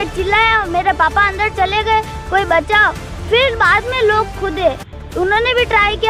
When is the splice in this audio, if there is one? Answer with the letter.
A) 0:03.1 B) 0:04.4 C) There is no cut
C